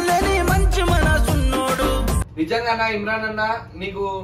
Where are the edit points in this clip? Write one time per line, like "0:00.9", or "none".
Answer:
0:02.2